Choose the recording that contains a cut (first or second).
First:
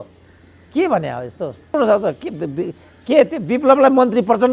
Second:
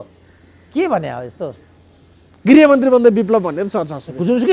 first